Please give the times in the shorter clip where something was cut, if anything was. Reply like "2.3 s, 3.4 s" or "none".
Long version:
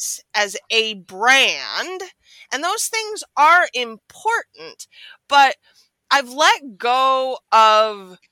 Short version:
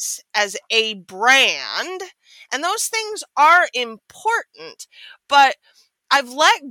none